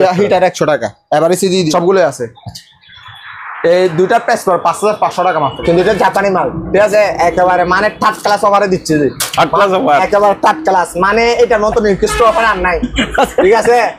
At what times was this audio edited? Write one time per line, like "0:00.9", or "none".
0:01.7
0:05.6